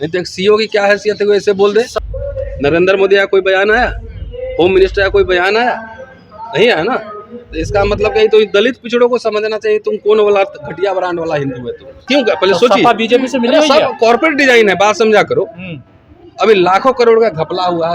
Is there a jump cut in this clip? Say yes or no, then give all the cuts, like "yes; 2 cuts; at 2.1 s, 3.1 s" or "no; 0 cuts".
yes; 2 cuts; at 1.9 s, 11.9 s